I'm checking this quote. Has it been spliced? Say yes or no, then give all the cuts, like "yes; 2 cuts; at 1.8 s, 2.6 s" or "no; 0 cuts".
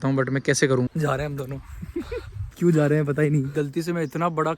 yes; 2 cuts; at 0.9 s, 3.5 s